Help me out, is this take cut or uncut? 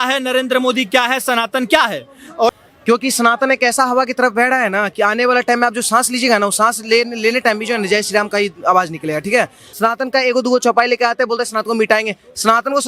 cut